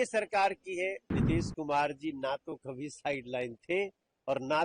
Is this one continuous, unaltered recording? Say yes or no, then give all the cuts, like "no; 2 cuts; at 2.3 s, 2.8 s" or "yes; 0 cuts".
no; 1 cut; at 1.1 s